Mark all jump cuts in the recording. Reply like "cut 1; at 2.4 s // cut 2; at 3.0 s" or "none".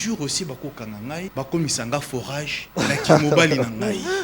cut 1; at 1.3 s // cut 2; at 2.6 s